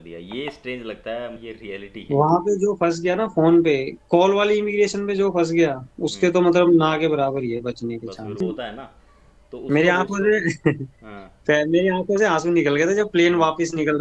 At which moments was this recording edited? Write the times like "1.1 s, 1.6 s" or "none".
1.4 s, 8.4 s